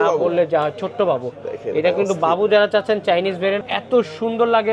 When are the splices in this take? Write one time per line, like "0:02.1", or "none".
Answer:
0:03.6